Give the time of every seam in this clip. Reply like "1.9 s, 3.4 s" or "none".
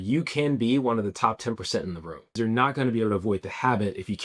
2.4 s